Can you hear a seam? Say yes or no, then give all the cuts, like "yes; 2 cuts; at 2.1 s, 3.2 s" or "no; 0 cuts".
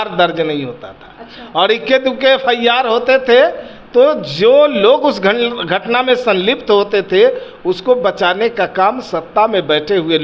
no; 0 cuts